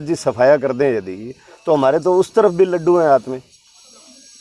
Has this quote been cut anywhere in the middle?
no; 0 cuts

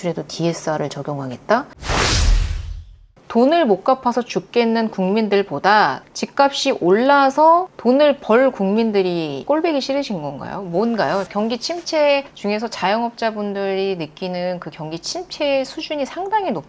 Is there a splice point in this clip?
yes; 4 cuts; at 1.8 s, 3.2 s, 9.4 s, 11.3 s

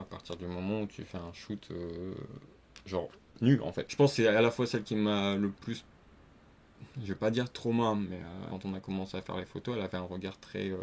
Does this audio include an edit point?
yes; 2 cuts; at 3.8 s, 8.5 s

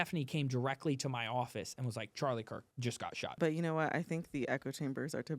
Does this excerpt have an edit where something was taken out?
yes; 1 cut; at 3.3 s

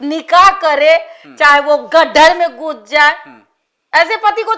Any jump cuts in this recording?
no; 0 cuts

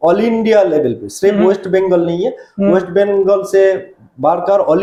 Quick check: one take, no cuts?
yes; 0 cuts

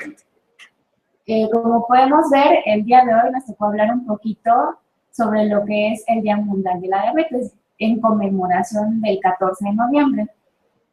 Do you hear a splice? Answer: no; 0 cuts

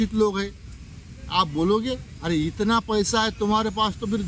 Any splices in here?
no; 0 cuts

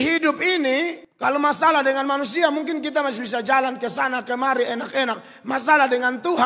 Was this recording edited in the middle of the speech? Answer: yes; 1 cut; at 1.0 s

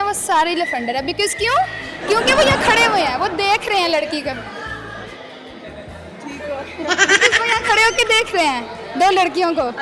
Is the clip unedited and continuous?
yes; 0 cuts

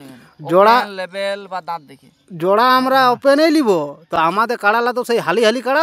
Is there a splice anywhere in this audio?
no; 0 cuts

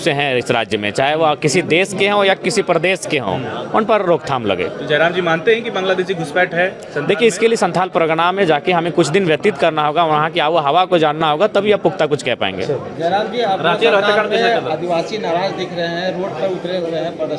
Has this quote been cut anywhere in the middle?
no; 0 cuts

